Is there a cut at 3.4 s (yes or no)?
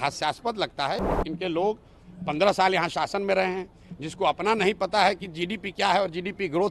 no